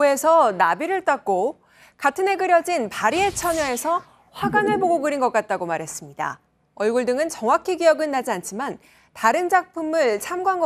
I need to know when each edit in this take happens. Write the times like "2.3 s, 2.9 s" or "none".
1.5 s